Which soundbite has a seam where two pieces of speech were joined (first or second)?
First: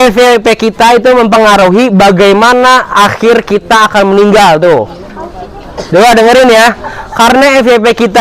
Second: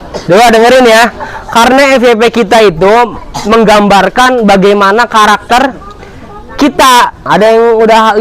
second